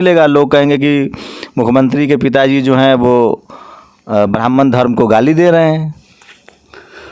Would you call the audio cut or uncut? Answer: uncut